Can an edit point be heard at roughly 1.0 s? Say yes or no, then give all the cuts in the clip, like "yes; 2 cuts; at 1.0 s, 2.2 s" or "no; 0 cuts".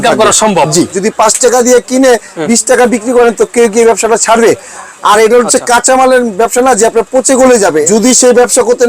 yes; 2 cuts; at 1.0 s, 7.8 s